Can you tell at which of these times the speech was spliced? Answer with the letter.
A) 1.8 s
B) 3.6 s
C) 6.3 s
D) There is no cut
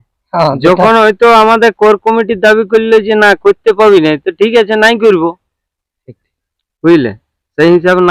D